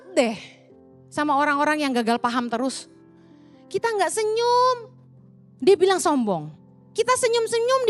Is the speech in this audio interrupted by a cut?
no; 0 cuts

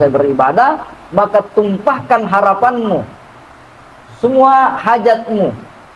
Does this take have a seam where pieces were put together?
no; 0 cuts

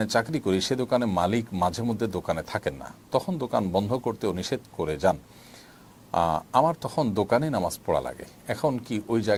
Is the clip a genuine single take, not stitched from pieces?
yes; 0 cuts

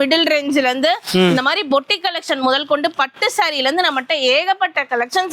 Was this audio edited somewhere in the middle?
no; 0 cuts

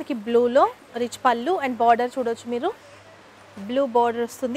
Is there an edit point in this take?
no; 0 cuts

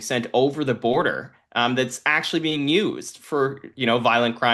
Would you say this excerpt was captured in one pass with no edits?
yes; 0 cuts

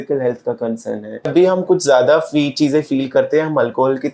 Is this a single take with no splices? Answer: no; 1 cut; at 1.3 s

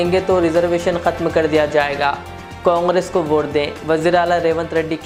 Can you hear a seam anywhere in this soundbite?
no; 0 cuts

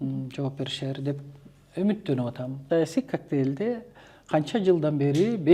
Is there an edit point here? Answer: yes; 1 cut; at 2.5 s

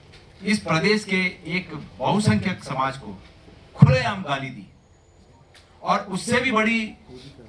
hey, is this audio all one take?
yes; 0 cuts

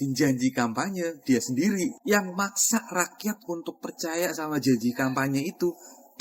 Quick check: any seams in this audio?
yes; 1 cut; at 2.0 s

